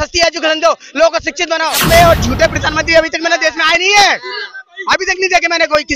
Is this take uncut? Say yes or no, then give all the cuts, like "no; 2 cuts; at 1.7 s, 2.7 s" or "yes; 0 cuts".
no; 1 cut; at 1.8 s